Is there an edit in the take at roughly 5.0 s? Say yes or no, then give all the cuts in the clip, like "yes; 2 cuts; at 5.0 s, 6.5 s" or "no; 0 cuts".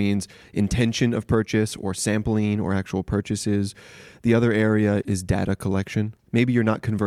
yes; 2 cuts; at 5.0 s, 6.1 s